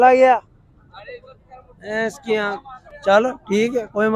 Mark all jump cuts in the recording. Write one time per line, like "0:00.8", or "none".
none